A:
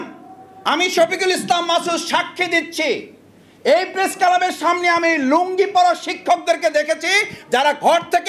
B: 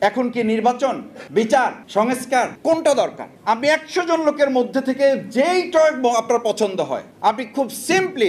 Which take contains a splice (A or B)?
B